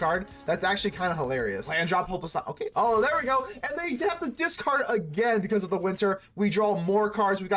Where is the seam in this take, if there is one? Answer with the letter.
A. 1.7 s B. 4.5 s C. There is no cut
A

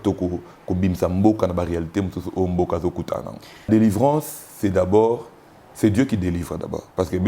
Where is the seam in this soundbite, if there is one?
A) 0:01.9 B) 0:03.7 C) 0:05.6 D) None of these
B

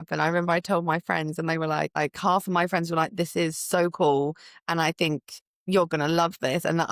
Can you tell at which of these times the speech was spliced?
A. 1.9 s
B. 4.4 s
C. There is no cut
A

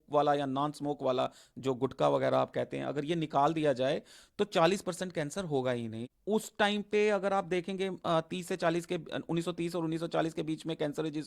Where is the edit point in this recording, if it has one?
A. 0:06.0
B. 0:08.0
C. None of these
A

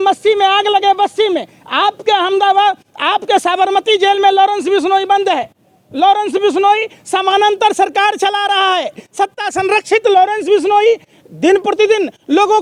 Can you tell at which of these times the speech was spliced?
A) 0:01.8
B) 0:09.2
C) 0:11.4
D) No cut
D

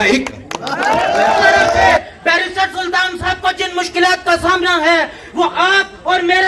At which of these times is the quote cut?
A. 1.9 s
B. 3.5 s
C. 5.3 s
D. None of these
A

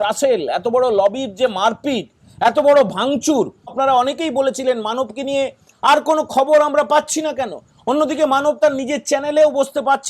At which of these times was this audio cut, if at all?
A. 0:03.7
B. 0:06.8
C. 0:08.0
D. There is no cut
A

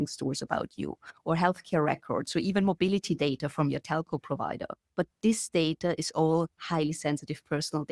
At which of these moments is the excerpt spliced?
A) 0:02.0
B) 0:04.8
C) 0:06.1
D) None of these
B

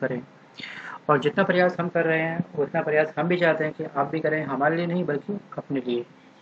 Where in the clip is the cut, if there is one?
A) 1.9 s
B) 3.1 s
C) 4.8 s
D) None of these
A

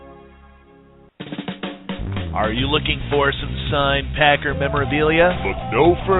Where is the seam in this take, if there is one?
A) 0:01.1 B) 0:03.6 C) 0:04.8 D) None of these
A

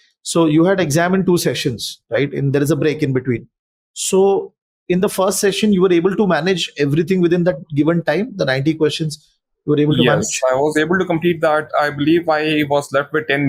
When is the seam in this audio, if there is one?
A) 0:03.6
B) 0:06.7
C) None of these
C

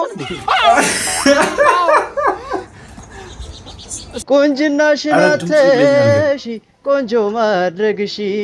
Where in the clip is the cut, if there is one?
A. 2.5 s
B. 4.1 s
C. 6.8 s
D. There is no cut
B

